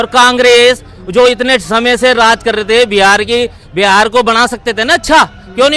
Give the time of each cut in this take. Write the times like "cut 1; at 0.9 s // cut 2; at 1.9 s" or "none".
none